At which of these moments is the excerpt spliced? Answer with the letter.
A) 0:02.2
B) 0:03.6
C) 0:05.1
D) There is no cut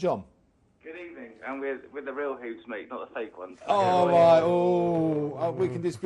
A